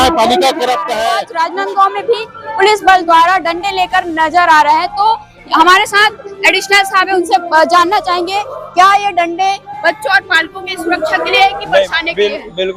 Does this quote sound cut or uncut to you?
cut